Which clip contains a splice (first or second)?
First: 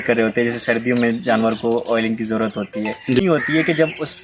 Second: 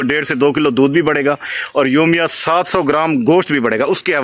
first